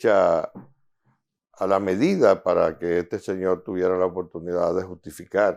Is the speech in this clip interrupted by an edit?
no; 0 cuts

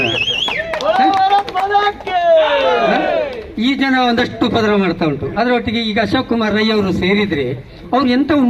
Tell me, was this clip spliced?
no; 0 cuts

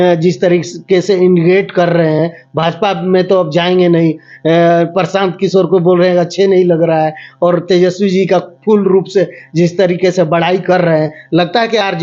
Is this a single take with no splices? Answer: yes; 0 cuts

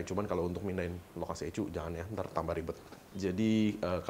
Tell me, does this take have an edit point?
yes; 1 cut; at 2.9 s

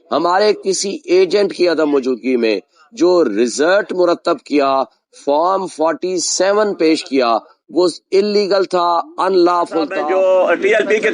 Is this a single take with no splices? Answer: no; 1 cut; at 10.0 s

